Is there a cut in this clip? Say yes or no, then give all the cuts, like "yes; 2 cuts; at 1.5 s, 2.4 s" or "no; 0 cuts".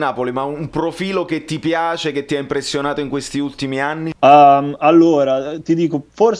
yes; 1 cut; at 4.1 s